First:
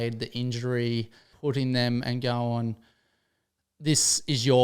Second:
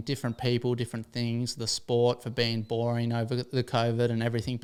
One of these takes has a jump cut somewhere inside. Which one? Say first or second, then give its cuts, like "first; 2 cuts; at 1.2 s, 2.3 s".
first; 1 cut; at 1.3 s